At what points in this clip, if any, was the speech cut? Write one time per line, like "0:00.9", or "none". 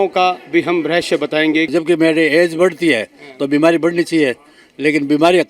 0:01.7